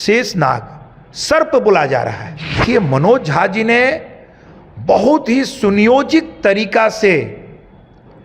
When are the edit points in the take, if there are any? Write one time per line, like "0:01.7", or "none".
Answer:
0:02.6